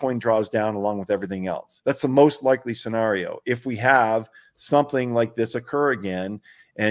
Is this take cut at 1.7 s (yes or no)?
yes